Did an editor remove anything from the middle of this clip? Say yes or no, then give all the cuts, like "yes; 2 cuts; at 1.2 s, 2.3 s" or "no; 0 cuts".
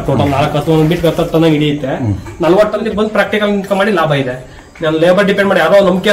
yes; 1 cut; at 2.8 s